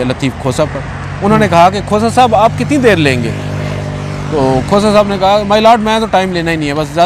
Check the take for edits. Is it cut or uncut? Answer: uncut